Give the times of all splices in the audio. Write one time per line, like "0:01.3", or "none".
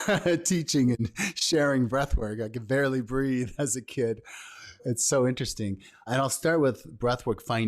0:04.9
0:06.1